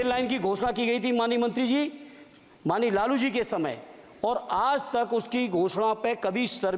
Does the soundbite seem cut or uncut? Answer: uncut